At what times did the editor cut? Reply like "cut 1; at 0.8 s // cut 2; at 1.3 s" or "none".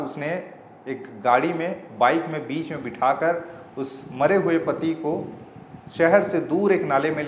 none